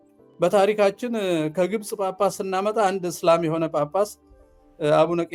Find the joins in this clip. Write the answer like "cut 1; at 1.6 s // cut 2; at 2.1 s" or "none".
none